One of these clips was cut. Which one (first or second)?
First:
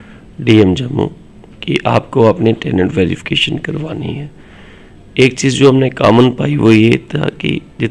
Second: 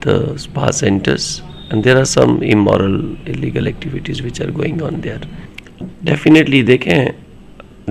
second